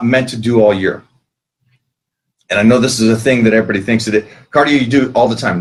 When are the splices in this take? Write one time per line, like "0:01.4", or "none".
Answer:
none